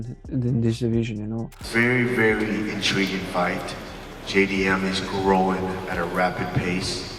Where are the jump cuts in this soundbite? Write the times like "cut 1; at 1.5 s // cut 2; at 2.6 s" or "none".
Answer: cut 1; at 1.5 s